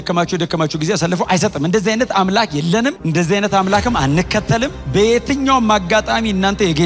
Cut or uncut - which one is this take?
cut